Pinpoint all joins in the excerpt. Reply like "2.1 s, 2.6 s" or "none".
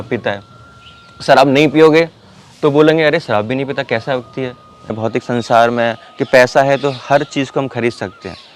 5.0 s

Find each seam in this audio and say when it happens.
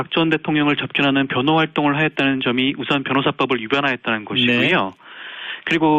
2.6 s

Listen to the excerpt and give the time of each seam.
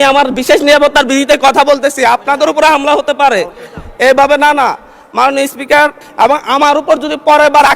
6.0 s

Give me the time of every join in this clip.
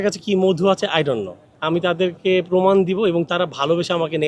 1.5 s

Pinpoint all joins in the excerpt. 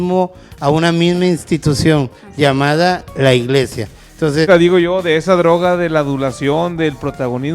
4.5 s

